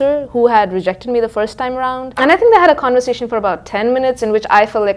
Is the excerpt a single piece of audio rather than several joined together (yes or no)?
no